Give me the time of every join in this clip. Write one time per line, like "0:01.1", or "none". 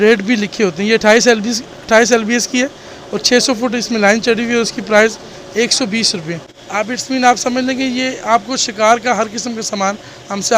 0:06.5